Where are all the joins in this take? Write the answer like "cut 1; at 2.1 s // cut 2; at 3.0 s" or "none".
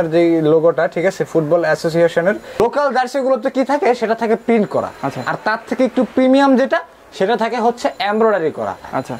cut 1; at 2.6 s

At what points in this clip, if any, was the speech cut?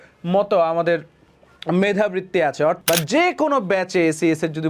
cut 1; at 2.8 s

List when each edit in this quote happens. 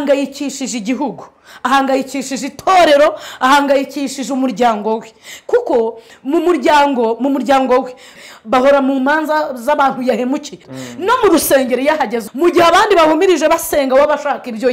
cut 1; at 8.1 s // cut 2; at 10.7 s // cut 3; at 12.2 s

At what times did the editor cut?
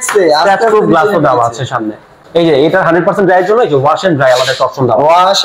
cut 1; at 2.2 s

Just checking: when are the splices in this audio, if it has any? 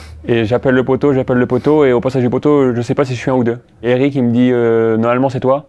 cut 1; at 3.8 s

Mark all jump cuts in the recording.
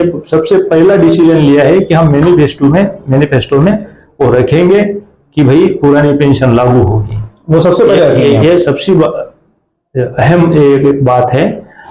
none

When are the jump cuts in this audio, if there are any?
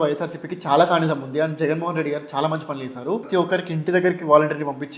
cut 1; at 3.3 s

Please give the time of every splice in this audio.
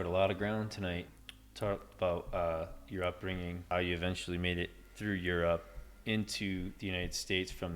cut 1; at 1.1 s // cut 2; at 3.7 s

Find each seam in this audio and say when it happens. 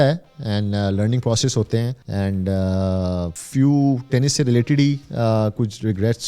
cut 1; at 2.0 s // cut 2; at 3.4 s

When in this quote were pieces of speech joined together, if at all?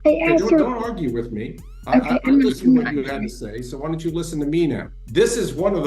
cut 1; at 4.9 s

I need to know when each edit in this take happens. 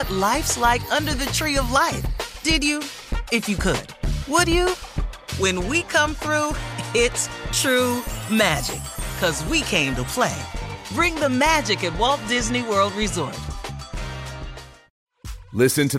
cut 1; at 14.8 s

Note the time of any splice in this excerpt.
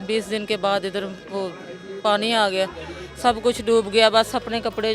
none

